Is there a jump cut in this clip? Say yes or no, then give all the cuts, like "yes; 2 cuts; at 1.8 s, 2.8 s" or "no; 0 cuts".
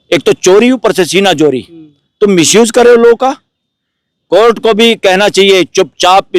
no; 0 cuts